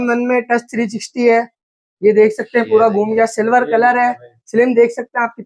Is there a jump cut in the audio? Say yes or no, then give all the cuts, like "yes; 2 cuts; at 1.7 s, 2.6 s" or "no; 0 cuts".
no; 0 cuts